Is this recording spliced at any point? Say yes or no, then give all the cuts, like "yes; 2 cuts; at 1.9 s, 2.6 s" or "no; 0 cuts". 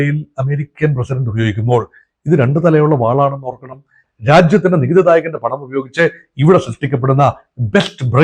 yes; 1 cut; at 4.1 s